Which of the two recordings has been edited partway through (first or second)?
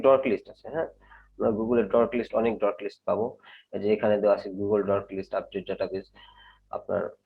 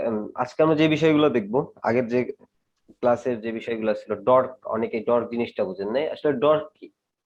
first